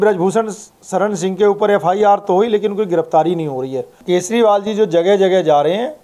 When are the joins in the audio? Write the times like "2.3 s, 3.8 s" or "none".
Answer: 3.9 s